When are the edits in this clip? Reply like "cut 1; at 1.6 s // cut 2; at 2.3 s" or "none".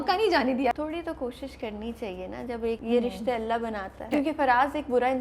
cut 1; at 0.7 s // cut 2; at 2.8 s // cut 3; at 4.0 s